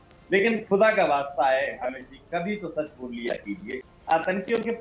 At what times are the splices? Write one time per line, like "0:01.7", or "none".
0:03.7